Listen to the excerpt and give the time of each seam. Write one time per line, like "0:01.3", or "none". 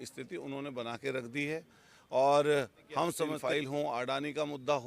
0:03.4